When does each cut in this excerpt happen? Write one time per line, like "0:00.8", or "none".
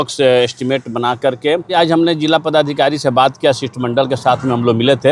0:01.7